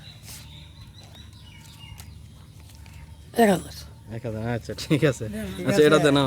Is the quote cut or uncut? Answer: uncut